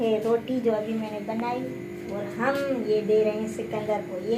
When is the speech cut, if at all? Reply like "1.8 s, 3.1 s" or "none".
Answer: none